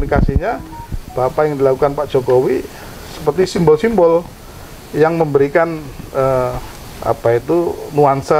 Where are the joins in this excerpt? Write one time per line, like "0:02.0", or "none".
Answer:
none